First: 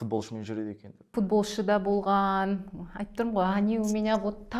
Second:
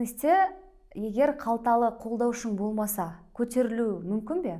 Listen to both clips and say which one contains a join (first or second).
first